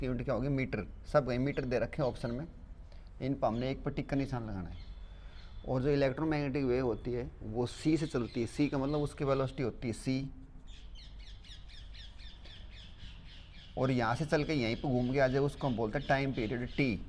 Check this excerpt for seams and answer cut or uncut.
uncut